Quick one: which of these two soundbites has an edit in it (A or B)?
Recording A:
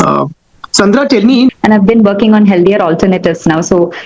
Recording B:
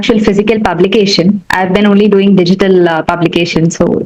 A